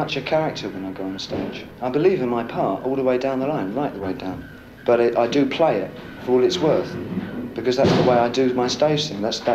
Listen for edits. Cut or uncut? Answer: cut